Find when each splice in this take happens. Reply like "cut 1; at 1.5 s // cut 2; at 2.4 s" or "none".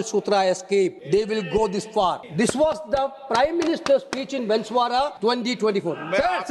cut 1; at 1.0 s // cut 2; at 2.2 s // cut 3; at 5.1 s